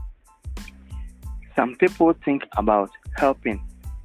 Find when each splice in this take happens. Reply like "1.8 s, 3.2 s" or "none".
1.4 s